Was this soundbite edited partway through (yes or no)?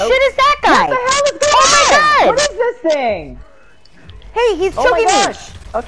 no